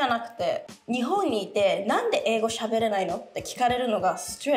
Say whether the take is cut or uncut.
uncut